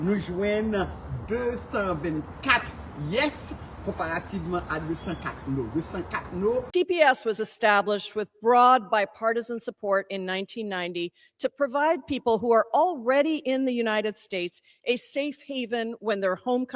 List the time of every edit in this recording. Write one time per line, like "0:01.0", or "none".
0:06.7